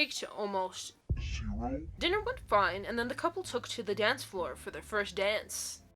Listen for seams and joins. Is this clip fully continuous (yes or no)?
no